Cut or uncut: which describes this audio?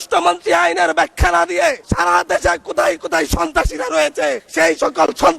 cut